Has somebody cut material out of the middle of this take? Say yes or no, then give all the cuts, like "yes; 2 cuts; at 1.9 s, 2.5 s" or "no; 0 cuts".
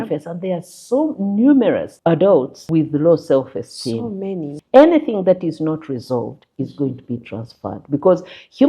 yes; 3 cuts; at 1.9 s, 2.6 s, 4.6 s